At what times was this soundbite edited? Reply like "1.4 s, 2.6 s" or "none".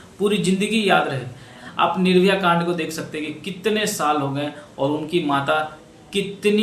1.6 s